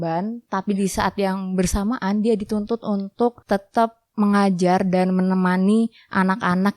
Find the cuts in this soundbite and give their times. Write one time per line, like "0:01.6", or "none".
0:03.4